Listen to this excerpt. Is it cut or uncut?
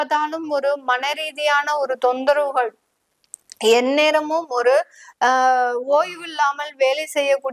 uncut